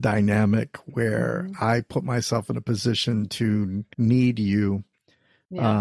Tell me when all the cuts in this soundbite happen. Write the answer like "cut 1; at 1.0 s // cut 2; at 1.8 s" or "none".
cut 1; at 3.8 s